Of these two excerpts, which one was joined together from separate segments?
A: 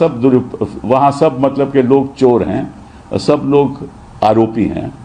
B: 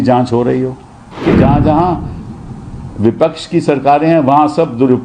B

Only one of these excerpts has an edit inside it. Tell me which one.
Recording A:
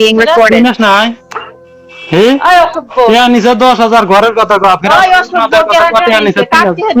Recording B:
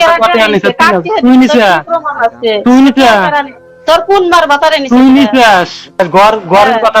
B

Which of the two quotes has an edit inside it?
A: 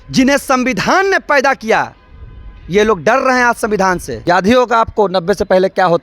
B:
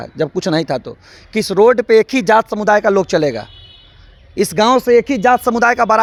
A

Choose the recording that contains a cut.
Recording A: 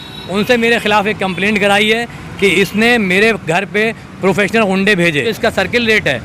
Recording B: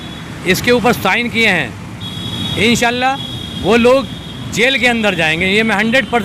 A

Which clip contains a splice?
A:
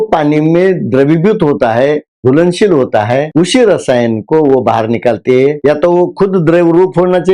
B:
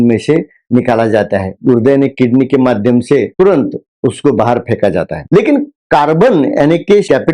B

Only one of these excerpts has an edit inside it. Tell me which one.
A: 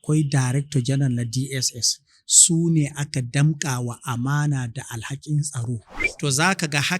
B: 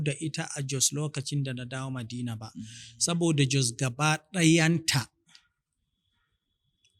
A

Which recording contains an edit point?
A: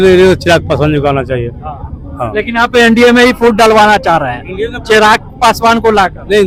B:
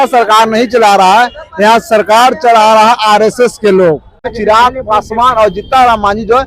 B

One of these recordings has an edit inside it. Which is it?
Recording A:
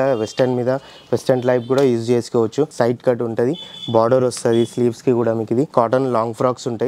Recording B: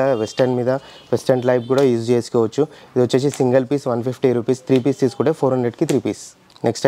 A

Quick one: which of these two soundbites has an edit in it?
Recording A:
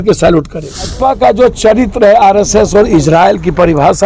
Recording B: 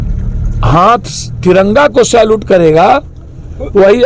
A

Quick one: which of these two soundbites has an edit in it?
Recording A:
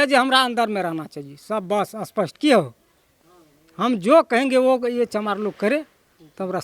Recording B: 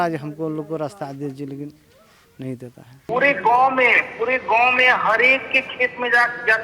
B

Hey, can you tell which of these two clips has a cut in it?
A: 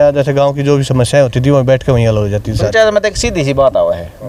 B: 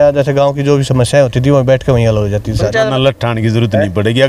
B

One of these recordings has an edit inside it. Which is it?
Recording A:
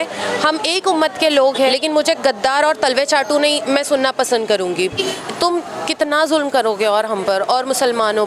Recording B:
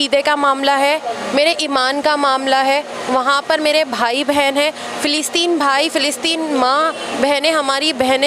A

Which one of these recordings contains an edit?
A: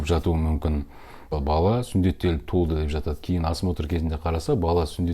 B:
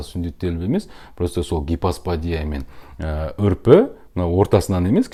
A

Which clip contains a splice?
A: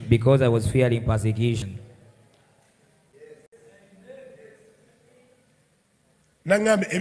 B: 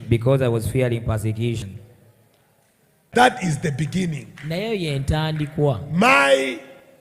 B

